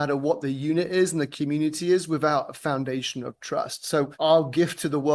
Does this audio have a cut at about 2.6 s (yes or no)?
no